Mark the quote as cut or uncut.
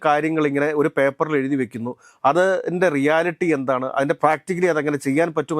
cut